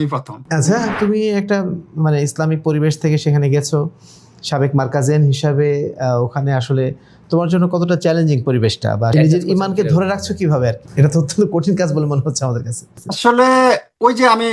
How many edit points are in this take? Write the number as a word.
three